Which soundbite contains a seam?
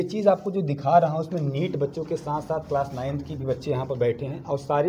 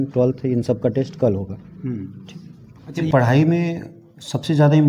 second; 1 cut; at 3.1 s

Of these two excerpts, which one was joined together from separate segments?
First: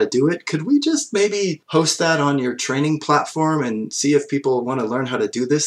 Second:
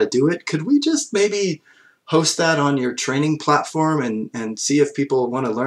first; 2 cuts; at 1.6 s, 3.9 s

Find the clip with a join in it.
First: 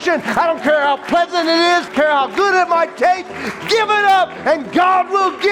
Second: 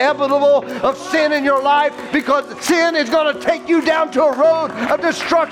first; 1 cut; at 1.9 s

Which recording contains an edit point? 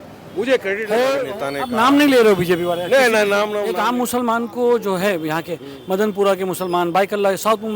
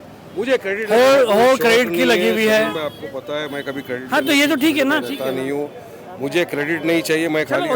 first; 2 cuts; at 1.2 s, 3.7 s

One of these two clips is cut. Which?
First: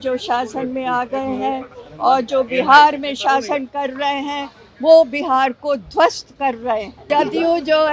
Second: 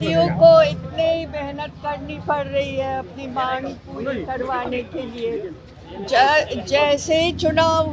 first; 1 cut; at 7.0 s

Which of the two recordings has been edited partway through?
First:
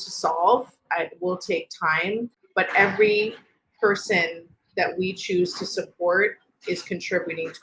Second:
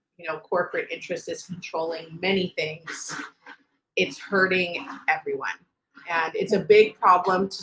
first; 1 cut; at 2.4 s

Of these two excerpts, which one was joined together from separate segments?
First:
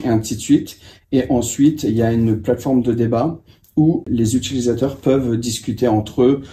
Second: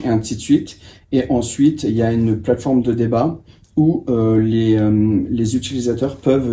first; 1 cut; at 4.1 s

